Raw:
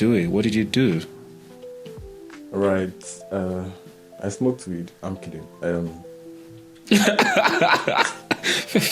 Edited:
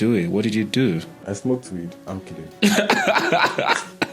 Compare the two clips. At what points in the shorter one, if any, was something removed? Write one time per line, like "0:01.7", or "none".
0:01.1
0:02.6